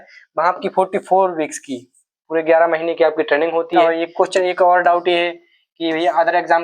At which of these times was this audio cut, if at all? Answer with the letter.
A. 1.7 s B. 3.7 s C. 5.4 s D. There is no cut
B